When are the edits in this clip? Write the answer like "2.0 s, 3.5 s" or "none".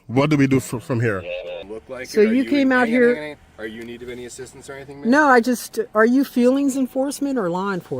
1.6 s